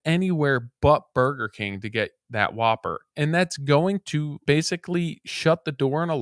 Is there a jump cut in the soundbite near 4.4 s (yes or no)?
yes